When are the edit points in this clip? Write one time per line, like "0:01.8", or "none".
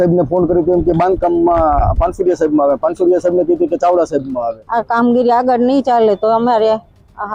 0:04.6